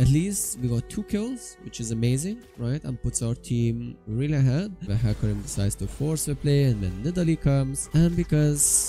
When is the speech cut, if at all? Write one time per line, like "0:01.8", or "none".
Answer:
0:04.9
0:07.8